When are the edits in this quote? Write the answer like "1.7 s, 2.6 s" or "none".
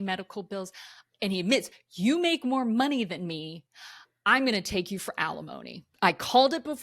1.0 s, 5.8 s